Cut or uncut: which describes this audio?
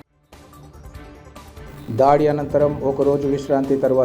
uncut